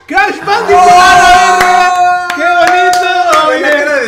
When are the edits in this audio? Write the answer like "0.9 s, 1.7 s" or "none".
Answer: none